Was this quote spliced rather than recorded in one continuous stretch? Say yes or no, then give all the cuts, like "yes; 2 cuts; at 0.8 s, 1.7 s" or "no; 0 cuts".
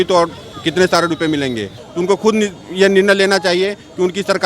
yes; 1 cut; at 1.8 s